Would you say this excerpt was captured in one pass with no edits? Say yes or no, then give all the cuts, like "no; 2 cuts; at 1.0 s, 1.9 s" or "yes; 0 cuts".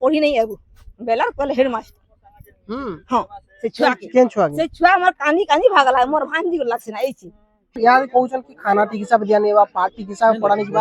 no; 1 cut; at 7.8 s